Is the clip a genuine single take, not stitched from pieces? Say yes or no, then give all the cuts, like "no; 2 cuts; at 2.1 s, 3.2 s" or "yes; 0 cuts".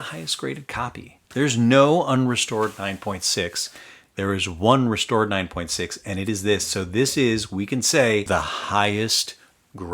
no; 2 cuts; at 1.2 s, 8.2 s